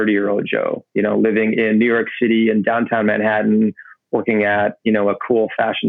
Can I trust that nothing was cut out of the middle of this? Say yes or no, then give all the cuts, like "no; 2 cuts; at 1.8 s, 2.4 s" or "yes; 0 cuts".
yes; 0 cuts